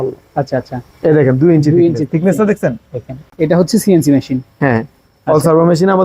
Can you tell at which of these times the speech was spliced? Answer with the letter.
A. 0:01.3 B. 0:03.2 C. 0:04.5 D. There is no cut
B